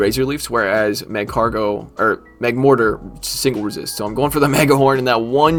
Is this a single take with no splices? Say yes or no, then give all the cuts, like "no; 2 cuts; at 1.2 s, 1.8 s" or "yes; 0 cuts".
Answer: yes; 0 cuts